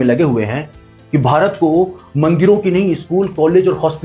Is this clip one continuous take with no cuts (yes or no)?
yes